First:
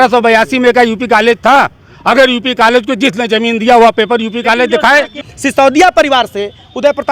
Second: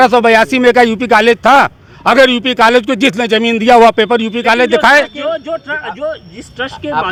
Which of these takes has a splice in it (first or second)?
first